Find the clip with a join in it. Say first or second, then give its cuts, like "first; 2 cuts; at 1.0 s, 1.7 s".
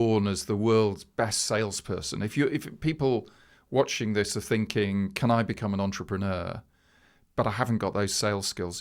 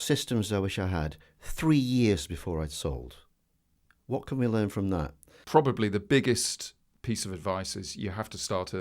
second; 1 cut; at 5.3 s